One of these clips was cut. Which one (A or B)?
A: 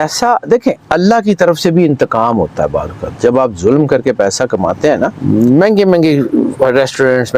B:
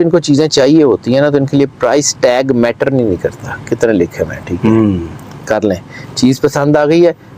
A